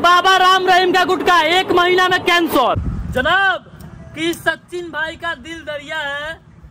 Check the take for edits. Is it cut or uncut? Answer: cut